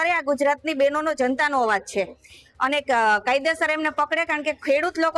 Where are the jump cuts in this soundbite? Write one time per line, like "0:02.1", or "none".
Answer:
none